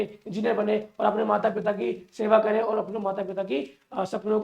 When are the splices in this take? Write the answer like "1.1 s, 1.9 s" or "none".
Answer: none